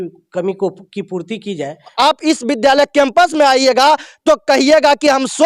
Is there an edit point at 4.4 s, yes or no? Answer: no